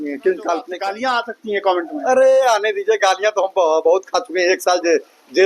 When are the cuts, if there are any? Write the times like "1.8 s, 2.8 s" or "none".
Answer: 0.9 s